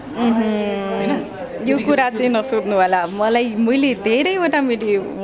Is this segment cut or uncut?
uncut